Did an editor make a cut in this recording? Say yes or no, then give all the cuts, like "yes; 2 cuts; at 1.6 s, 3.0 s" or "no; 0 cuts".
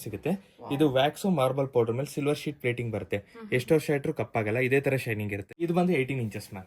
yes; 1 cut; at 5.5 s